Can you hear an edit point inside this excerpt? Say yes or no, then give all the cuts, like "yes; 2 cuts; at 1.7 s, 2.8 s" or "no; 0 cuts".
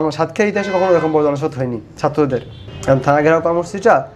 no; 0 cuts